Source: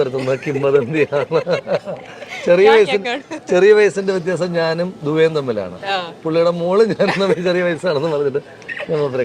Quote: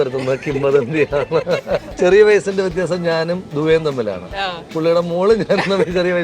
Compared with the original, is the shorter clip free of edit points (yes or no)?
no